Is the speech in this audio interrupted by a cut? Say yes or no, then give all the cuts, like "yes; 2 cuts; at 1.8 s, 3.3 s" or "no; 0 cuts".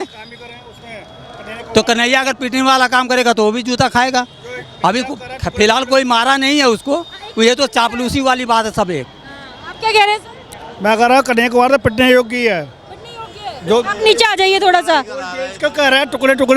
no; 0 cuts